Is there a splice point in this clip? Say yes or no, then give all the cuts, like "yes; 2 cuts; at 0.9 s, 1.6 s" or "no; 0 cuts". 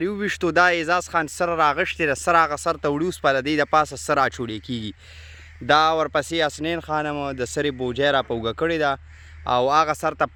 no; 0 cuts